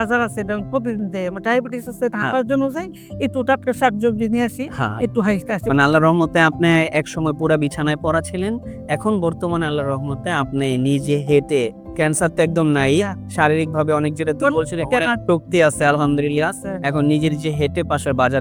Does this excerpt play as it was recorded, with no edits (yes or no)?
yes